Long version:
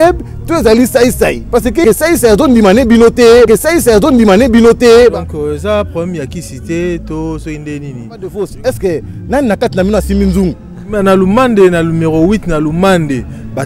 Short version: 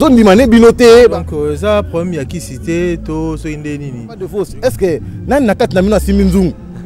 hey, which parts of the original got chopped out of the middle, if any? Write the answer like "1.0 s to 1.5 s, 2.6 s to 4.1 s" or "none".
3.4 s to 5.0 s